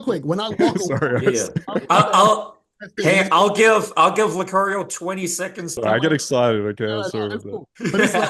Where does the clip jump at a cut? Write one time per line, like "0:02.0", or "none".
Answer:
0:05.7